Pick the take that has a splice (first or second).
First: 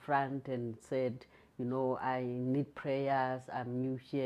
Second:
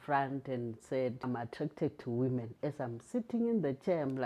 second